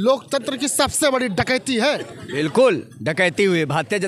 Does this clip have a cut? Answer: no; 0 cuts

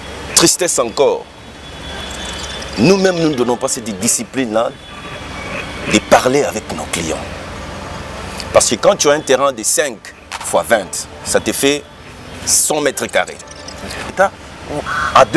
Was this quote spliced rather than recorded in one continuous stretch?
yes; 1 cut; at 14.1 s

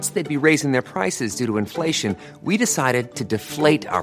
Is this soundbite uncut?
yes; 0 cuts

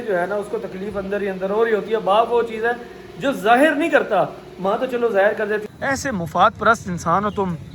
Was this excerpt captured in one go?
no; 1 cut; at 5.6 s

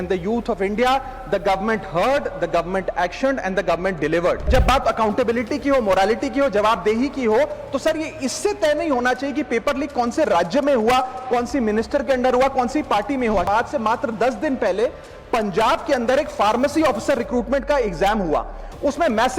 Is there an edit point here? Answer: yes; 2 cuts; at 4.5 s, 13.5 s

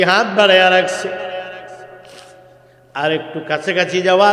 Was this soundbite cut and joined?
no; 0 cuts

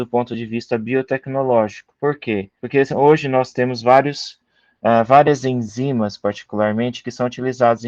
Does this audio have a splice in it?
no; 0 cuts

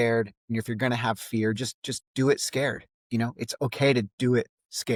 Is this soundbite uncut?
yes; 0 cuts

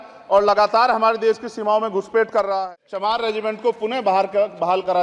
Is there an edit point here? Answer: yes; 1 cut; at 2.5 s

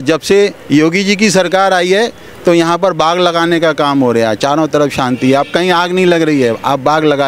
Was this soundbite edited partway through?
no; 0 cuts

